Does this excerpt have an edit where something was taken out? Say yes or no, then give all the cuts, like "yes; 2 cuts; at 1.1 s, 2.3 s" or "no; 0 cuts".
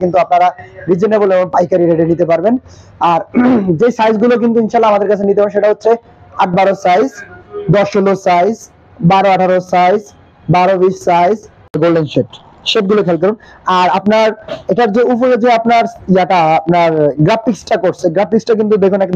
yes; 1 cut; at 11.8 s